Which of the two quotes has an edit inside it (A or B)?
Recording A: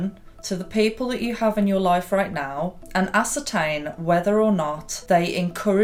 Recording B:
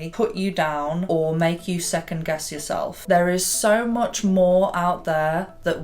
B